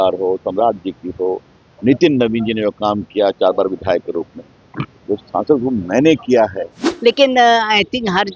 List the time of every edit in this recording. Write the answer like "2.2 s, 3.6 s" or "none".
6.8 s